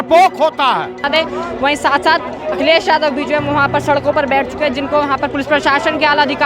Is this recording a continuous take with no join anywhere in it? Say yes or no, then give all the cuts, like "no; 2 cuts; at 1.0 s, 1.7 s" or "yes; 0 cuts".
no; 1 cut; at 1.1 s